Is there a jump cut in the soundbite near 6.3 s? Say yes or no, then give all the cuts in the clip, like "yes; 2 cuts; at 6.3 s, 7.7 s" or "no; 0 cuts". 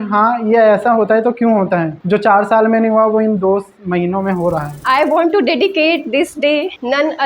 no; 2 cuts; at 1.9 s, 4.8 s